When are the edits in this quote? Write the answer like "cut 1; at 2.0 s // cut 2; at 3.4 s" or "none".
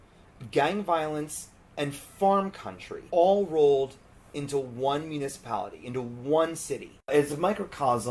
cut 1; at 3.0 s // cut 2; at 7.1 s